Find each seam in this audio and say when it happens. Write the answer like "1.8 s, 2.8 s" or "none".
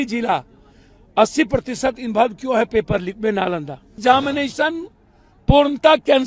4.0 s

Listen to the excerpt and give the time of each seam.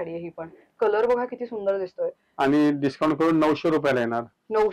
2.2 s

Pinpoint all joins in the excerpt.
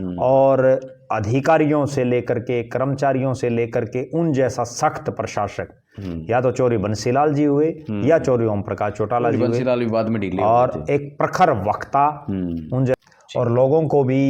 12.9 s

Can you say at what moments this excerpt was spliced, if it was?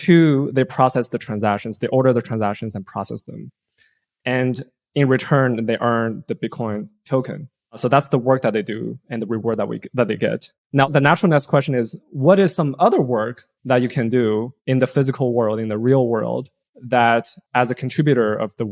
10.9 s

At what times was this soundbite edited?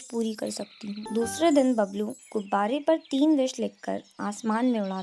1.0 s

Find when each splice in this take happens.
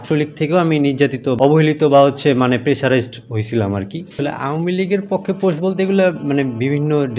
1.3 s, 4.1 s

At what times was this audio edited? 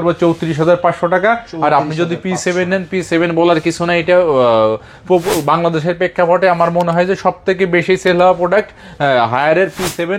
none

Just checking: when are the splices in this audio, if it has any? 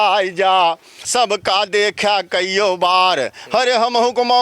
0.9 s

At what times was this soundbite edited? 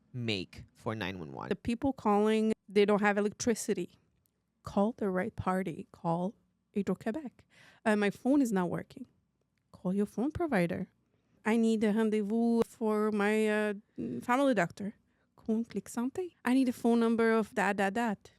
1.4 s

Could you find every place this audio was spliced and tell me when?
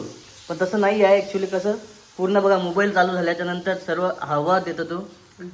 none

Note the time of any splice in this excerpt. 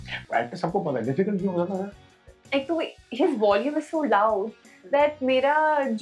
2.3 s

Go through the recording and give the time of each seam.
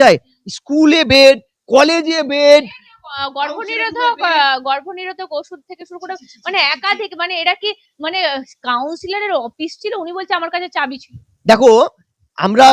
none

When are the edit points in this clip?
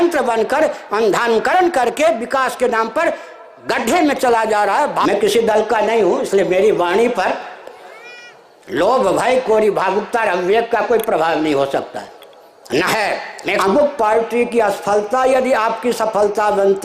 5.0 s, 13.6 s

